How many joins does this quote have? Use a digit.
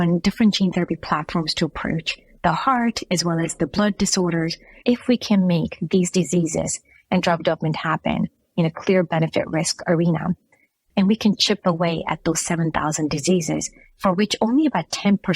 2